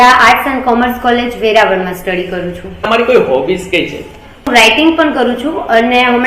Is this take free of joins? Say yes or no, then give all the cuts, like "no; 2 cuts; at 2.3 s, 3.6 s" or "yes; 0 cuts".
no; 2 cuts; at 2.9 s, 4.5 s